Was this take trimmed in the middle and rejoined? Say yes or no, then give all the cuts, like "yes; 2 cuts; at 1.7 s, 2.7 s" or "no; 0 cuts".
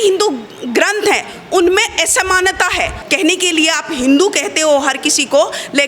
yes; 1 cut; at 3.0 s